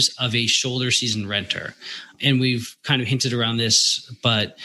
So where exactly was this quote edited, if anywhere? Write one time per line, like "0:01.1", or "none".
0:02.1